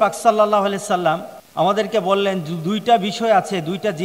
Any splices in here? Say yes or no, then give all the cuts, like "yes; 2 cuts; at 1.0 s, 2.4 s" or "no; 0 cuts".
yes; 1 cut; at 1.4 s